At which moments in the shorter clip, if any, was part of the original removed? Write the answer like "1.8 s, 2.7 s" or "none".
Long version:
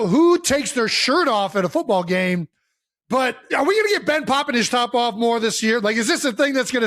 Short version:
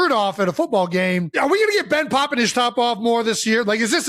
1.3 s